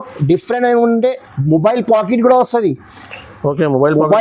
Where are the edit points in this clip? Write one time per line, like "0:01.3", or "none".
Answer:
none